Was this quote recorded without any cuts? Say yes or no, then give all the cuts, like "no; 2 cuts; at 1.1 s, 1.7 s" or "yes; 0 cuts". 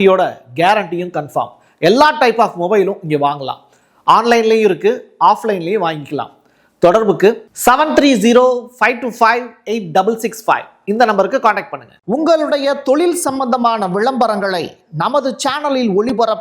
no; 1 cut; at 11.9 s